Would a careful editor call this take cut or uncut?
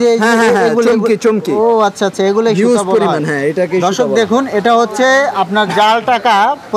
uncut